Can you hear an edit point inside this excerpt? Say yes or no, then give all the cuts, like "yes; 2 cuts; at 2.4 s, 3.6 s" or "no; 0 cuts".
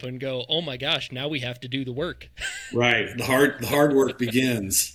no; 0 cuts